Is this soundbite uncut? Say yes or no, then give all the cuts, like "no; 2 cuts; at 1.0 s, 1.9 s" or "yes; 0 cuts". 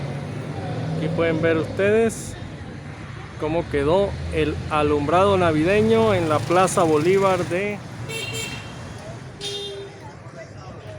no; 2 cuts; at 7.9 s, 9.9 s